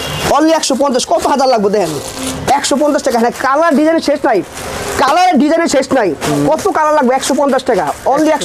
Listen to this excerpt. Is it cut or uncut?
uncut